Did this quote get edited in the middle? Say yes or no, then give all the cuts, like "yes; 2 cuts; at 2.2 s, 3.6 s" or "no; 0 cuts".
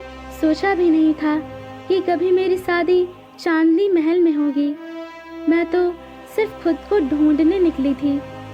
no; 0 cuts